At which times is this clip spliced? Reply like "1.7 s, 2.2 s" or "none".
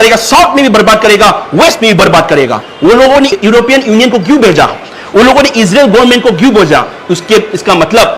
2.6 s